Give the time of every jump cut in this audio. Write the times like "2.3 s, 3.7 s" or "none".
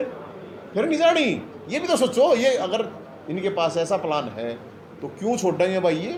none